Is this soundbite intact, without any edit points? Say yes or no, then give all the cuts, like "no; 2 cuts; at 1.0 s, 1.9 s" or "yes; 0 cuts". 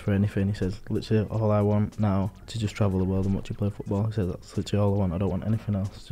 no; 1 cut; at 2.4 s